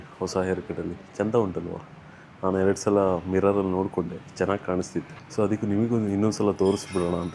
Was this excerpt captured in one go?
yes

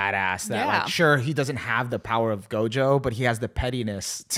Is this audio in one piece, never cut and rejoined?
yes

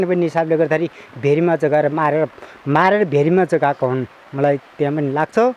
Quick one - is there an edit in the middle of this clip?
no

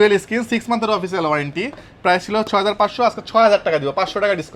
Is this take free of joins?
yes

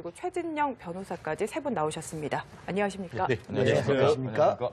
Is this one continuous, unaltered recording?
yes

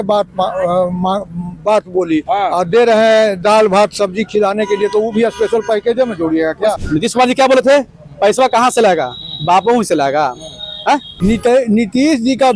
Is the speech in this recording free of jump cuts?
no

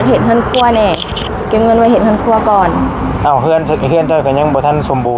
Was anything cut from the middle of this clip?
no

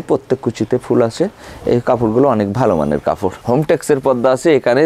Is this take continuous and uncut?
no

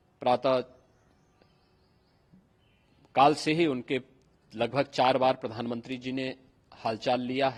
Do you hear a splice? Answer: no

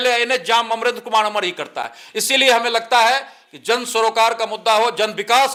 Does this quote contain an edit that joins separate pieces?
no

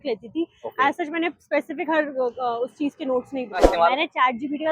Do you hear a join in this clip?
yes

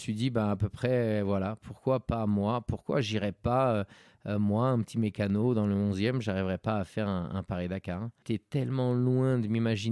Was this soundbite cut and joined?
yes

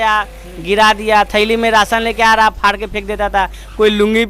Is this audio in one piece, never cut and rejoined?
yes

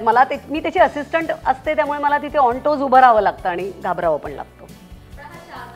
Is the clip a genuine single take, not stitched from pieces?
yes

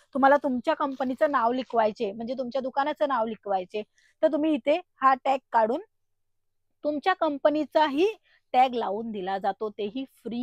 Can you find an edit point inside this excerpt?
no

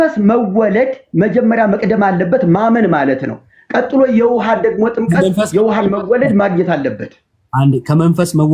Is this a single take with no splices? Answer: yes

